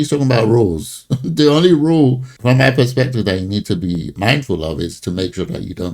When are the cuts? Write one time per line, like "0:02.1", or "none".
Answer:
0:04.1